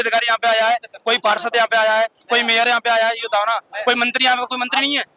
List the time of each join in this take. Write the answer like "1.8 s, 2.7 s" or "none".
none

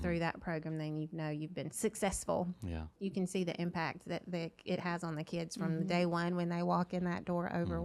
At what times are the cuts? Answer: 1.7 s, 2.9 s

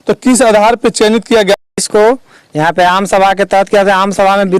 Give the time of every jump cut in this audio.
1.7 s

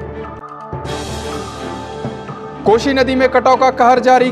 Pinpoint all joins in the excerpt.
none

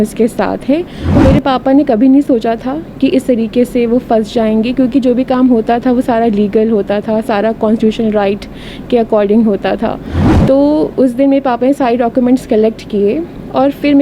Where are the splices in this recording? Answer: 1.0 s

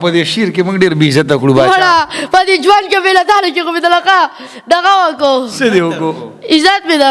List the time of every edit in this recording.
none

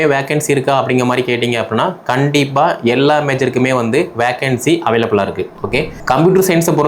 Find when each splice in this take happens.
5.9 s

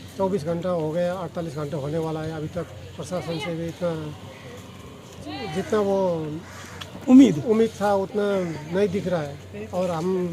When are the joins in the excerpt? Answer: none

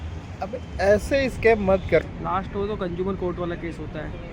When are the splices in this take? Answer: 2.0 s

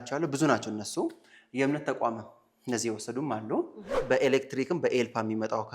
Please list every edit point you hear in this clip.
3.9 s

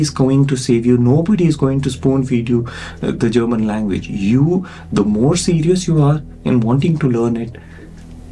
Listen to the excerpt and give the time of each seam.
none

